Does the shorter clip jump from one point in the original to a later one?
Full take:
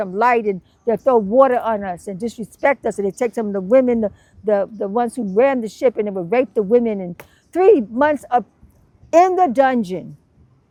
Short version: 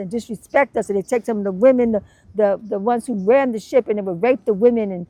no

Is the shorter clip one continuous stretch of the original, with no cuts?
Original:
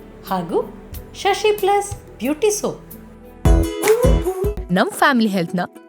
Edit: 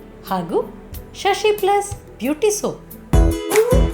no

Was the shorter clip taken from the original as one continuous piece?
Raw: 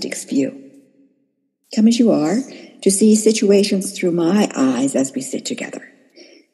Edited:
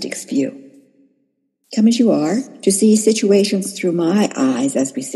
no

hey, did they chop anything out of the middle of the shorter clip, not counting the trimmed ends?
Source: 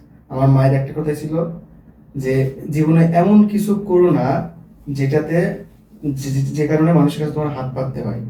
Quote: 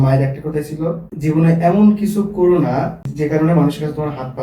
yes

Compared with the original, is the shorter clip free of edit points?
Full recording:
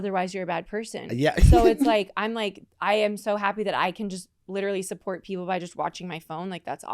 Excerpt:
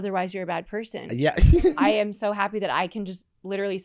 no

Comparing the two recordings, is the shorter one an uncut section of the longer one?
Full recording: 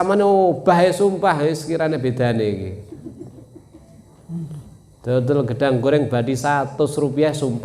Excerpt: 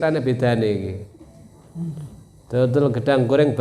no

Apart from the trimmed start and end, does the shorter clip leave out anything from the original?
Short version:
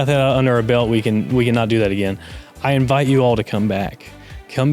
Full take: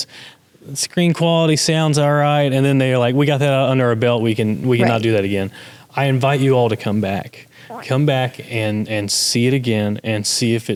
no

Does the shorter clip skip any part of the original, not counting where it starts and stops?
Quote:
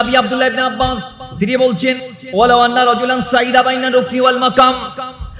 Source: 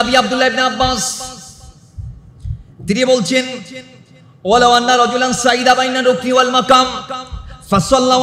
yes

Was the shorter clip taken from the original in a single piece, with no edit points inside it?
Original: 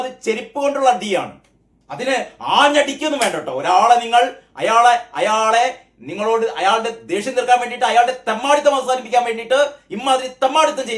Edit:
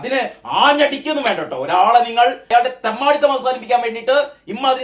no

